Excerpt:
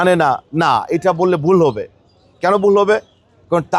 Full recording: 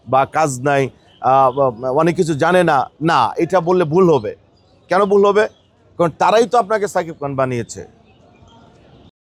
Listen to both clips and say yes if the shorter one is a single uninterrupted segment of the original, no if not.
yes